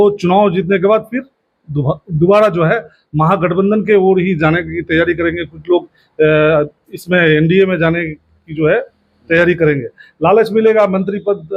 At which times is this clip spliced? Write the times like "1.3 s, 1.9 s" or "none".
none

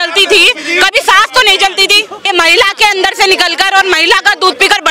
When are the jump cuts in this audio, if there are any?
2.3 s

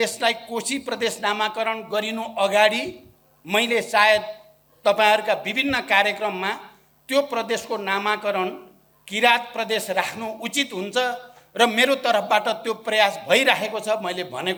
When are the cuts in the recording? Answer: none

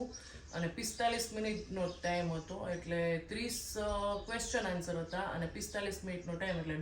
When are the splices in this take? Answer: none

